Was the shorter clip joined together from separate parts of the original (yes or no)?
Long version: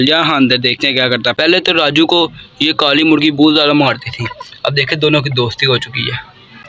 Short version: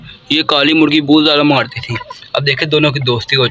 no